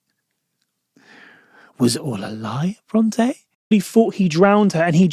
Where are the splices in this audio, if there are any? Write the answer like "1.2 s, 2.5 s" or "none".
3.7 s